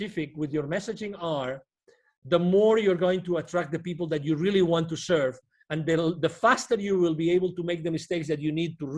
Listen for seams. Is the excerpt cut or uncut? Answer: uncut